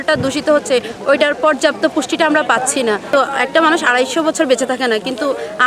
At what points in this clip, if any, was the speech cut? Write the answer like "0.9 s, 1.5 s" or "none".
3.1 s